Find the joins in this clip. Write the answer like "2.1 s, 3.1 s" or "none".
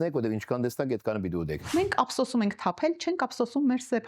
1.6 s